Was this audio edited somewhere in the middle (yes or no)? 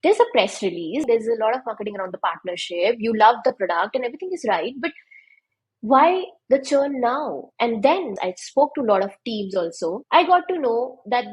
yes